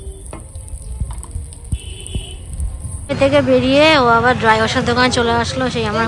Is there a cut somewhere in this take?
yes; 2 cuts; at 2.1 s, 3.0 s

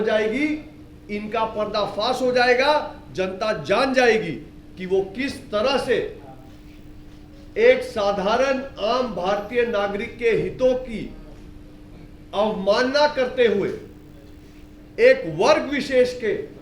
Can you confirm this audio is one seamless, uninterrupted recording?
yes; 0 cuts

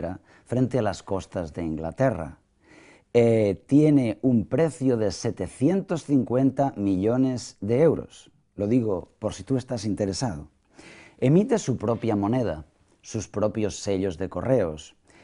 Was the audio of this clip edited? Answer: no; 0 cuts

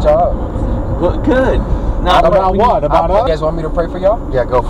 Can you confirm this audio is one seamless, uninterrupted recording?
no; 1 cut; at 3.2 s

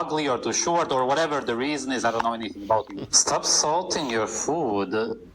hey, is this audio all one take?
no; 1 cut; at 2.9 s

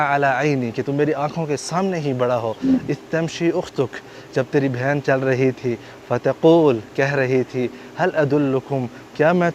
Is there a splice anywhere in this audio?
no; 0 cuts

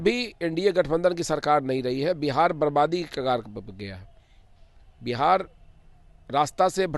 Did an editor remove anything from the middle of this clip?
no; 0 cuts

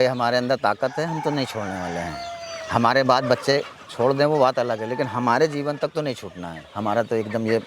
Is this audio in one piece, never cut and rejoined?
yes; 0 cuts

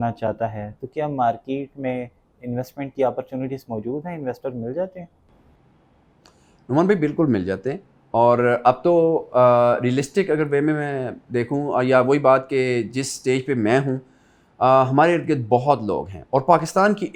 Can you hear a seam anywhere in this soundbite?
no; 0 cuts

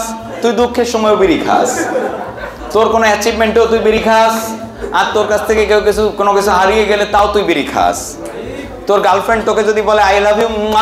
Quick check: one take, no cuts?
yes; 0 cuts

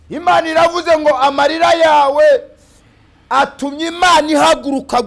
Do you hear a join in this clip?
no; 0 cuts

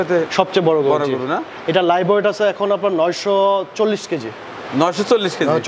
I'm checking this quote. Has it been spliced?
no; 0 cuts

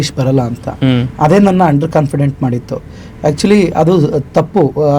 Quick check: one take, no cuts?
yes; 0 cuts

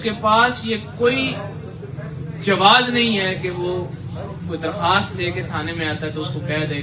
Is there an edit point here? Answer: no; 0 cuts

